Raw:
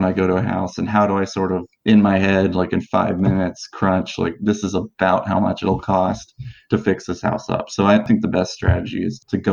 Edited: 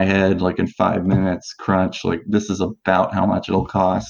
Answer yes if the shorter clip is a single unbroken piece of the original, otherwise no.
yes